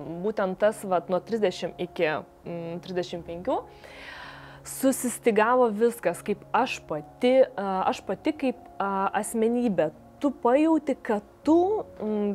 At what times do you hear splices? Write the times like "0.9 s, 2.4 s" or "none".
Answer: none